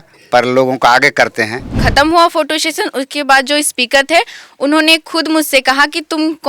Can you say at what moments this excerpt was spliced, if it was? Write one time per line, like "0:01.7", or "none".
0:01.8